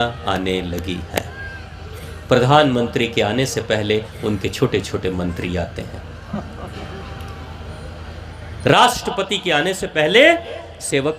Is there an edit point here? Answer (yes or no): no